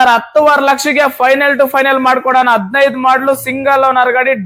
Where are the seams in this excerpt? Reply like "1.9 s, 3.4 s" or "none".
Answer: none